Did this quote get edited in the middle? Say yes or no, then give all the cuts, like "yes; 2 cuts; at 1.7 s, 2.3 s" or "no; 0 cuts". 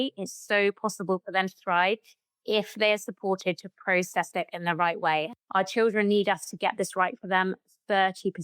yes; 1 cut; at 5.3 s